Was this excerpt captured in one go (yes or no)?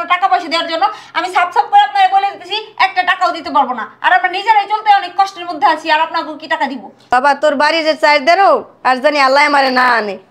no